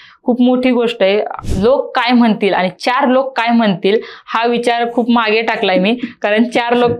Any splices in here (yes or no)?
yes